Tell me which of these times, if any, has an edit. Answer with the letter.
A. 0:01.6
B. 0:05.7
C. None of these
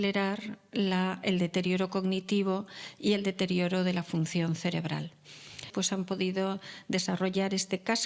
B